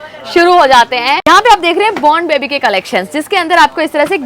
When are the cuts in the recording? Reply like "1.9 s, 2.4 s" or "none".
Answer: 1.2 s

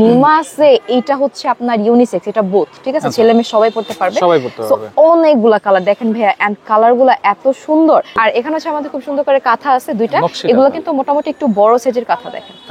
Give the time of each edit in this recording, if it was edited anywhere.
8.1 s

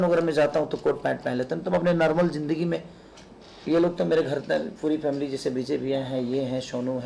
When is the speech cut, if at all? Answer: none

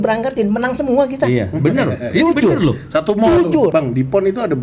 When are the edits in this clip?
3.7 s

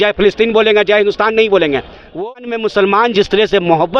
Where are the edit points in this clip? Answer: 2.1 s

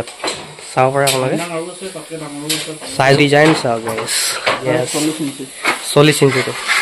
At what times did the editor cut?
3.2 s, 4.6 s

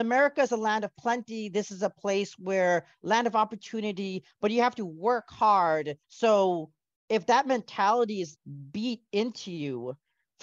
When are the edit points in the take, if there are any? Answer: 6.0 s

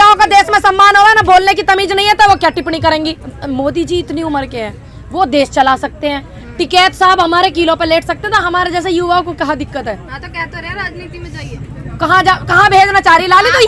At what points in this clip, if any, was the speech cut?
none

